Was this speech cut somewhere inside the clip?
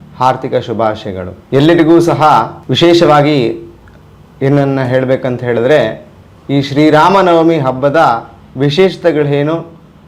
yes; 2 cuts; at 1.3 s, 2.6 s

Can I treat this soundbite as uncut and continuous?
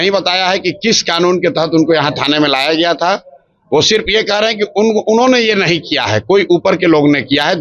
yes; 0 cuts

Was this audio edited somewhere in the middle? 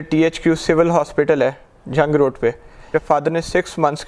yes; 1 cut; at 2.9 s

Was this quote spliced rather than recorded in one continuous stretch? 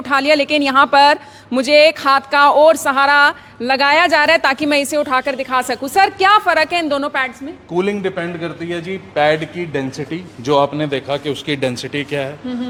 no; 0 cuts

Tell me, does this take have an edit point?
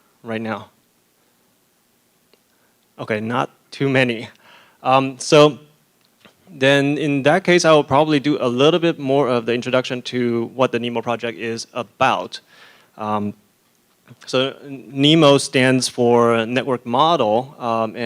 yes; 1 cut; at 13.2 s

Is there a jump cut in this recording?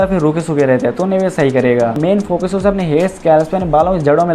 yes; 1 cut; at 2.0 s

